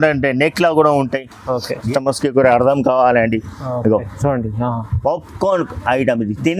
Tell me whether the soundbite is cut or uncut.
cut